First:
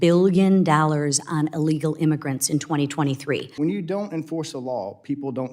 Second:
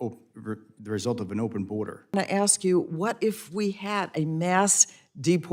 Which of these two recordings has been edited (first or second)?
first